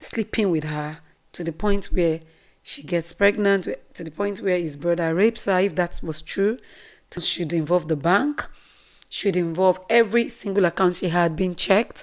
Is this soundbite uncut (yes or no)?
no